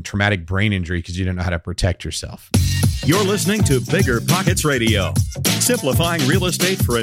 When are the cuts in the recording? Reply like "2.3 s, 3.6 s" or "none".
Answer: 2.3 s